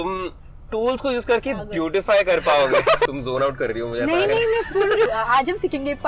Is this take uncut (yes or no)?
no